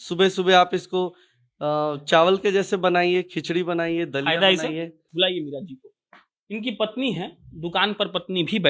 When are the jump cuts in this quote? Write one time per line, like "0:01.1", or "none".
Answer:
0:05.0